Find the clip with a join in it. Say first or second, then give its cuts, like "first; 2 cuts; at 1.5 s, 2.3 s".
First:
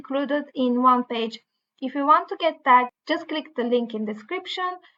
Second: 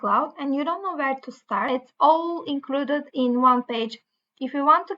second; 1 cut; at 1.7 s